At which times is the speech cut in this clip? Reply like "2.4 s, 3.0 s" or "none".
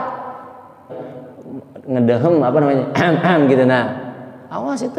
0.9 s

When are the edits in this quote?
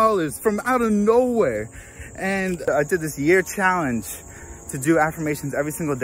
2.7 s

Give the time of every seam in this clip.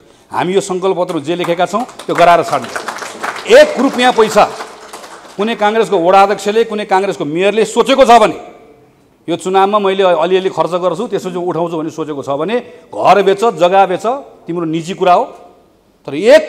none

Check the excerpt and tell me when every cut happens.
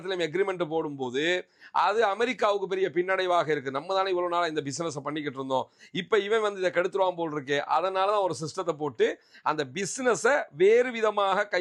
none

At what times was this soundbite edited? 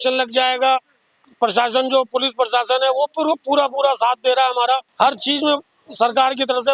1.1 s, 4.9 s

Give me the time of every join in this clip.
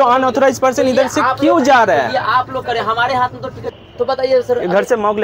3.7 s

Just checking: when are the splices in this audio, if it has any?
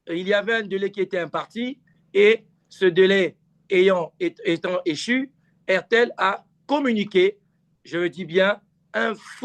none

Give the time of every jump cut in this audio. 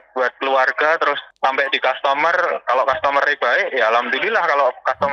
none

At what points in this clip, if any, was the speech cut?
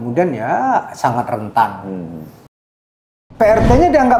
2.9 s

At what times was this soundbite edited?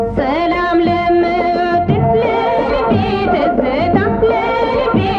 none

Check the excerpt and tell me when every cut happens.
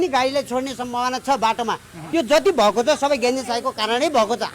2.0 s

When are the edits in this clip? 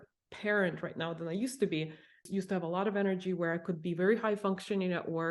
2.2 s

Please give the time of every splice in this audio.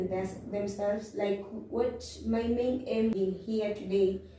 3.2 s

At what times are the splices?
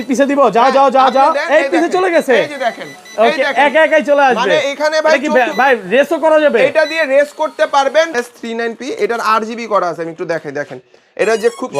8.1 s

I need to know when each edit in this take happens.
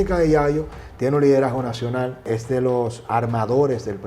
2.2 s

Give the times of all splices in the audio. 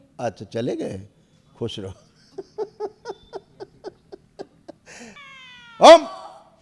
5.3 s

